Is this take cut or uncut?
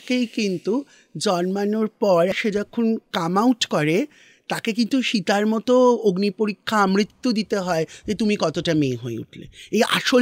cut